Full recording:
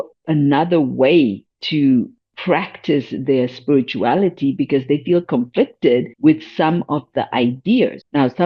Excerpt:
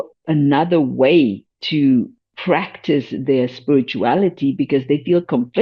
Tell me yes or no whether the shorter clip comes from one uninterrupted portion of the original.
yes